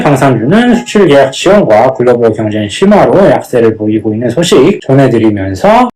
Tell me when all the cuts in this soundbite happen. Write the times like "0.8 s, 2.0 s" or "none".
none

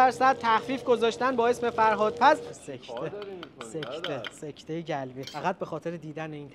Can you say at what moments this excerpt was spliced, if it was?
2.4 s, 5.3 s

